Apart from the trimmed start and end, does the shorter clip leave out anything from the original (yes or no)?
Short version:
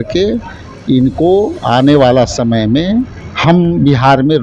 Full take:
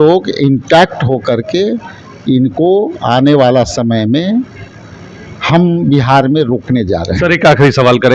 yes